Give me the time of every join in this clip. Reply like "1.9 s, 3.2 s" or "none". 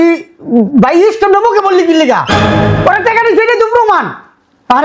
none